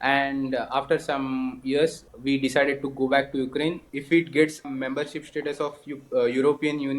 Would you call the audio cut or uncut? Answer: cut